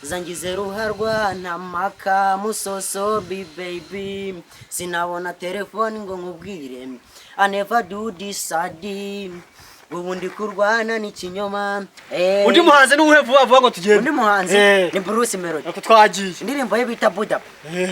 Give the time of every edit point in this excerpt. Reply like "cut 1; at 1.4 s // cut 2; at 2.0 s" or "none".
cut 1; at 12.0 s

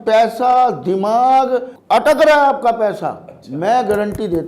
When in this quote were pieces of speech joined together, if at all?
cut 1; at 1.7 s

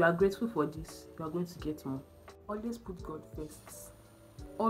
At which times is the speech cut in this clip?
none

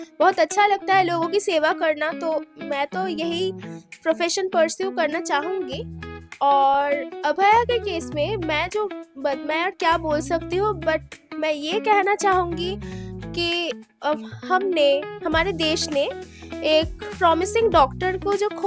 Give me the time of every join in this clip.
none

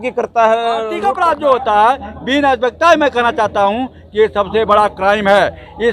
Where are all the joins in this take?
cut 1; at 0.9 s

